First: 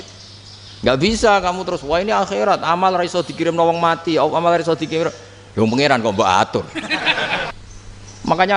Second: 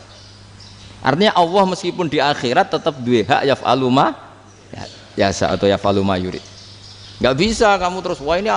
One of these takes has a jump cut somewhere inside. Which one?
first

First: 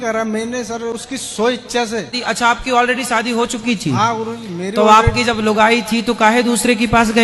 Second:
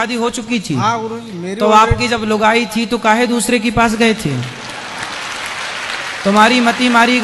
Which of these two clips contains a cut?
first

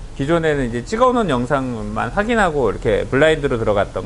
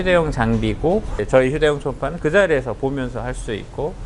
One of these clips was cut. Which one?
second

